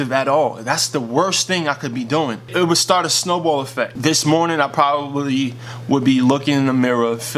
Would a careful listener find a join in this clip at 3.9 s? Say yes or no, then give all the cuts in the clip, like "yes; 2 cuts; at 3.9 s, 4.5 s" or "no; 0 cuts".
yes; 2 cuts; at 2.5 s, 3.9 s